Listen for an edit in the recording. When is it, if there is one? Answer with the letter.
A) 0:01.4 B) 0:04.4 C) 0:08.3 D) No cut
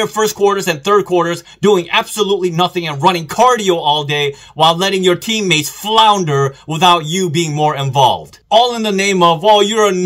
C